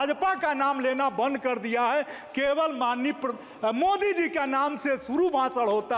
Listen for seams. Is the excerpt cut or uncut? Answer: uncut